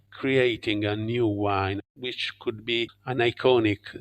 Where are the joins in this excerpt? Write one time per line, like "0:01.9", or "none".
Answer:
0:01.8